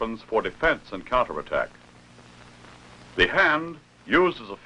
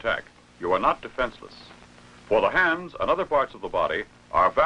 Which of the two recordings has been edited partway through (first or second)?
first